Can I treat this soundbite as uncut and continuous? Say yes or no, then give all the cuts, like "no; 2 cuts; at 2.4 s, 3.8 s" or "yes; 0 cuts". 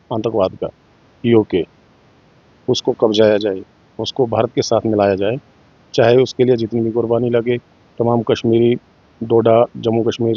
yes; 0 cuts